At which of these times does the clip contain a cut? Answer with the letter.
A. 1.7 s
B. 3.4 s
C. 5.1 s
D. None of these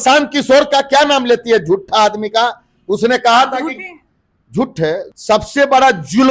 C